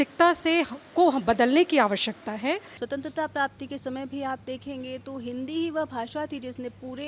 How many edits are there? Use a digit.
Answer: 1